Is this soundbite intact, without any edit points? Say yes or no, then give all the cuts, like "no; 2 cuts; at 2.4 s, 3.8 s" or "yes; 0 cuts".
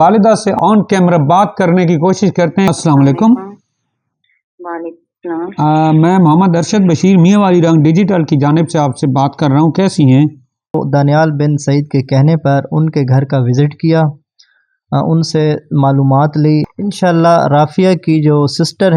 no; 3 cuts; at 2.7 s, 10.7 s, 16.7 s